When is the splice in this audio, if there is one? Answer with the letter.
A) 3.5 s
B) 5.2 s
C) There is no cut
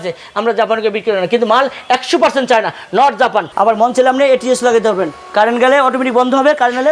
A